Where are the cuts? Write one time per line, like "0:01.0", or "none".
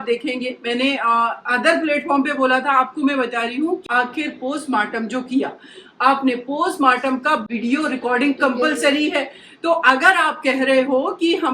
0:03.8